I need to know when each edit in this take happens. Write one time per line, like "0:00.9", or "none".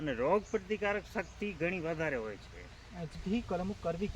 0:03.2